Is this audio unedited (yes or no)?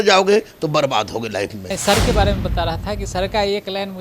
no